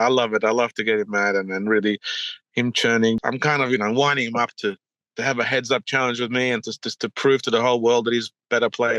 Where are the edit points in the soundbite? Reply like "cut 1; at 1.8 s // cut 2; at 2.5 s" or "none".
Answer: cut 1; at 3.2 s